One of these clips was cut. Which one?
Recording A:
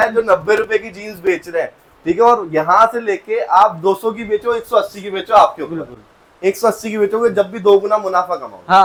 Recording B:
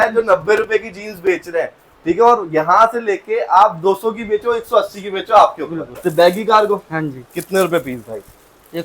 B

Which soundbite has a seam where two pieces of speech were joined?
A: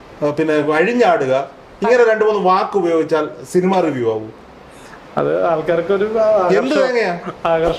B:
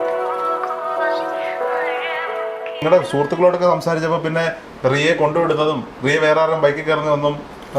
B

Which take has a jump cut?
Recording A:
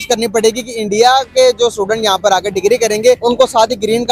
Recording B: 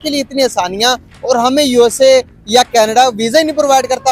A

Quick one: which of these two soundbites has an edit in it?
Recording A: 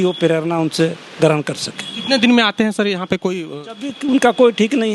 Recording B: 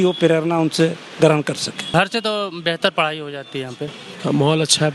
B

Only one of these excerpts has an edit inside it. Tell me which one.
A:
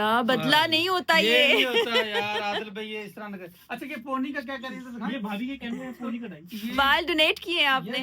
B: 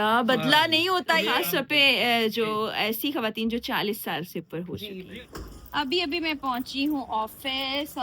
B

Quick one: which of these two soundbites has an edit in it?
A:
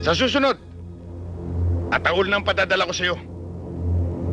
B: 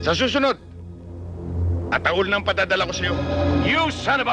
B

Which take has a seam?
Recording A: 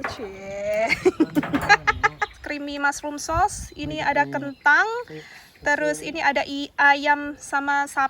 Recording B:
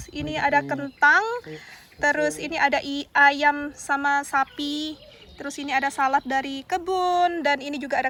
A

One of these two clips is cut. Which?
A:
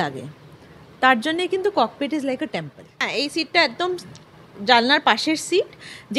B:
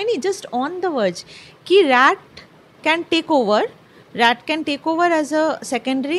A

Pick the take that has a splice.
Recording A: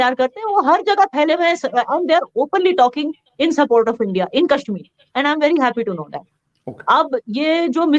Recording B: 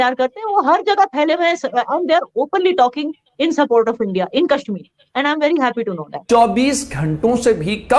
B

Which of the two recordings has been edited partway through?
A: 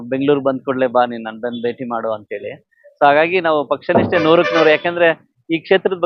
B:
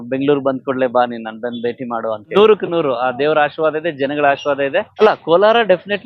B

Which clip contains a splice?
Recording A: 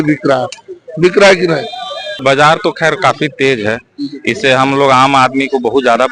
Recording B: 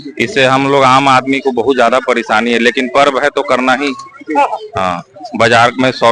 A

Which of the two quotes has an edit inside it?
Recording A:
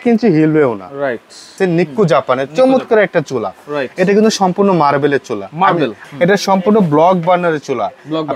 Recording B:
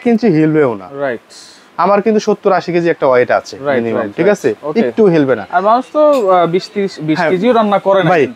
A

